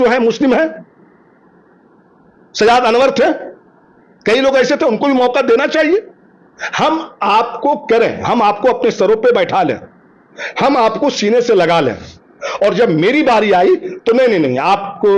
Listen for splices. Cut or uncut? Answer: uncut